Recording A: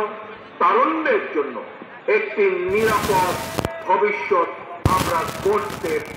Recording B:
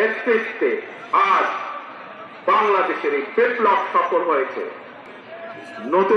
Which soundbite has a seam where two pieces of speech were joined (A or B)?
B